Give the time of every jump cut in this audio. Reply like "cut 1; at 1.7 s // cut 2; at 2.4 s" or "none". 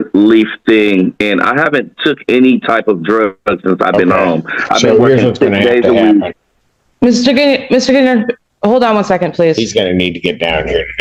none